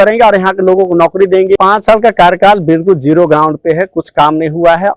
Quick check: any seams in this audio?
yes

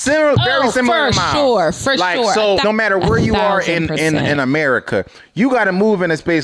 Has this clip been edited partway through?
yes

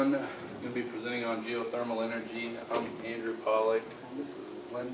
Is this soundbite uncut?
no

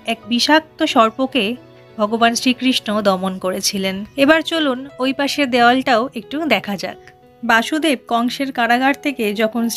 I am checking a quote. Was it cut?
no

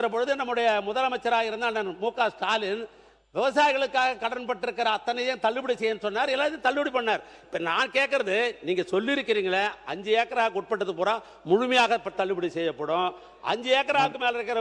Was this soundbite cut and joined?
no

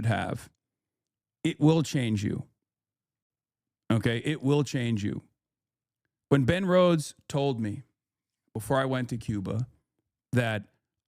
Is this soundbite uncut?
yes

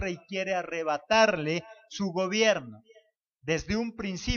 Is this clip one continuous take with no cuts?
no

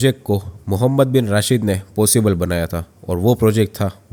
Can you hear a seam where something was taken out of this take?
no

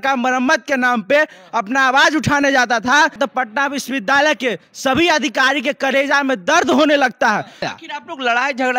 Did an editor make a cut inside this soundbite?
yes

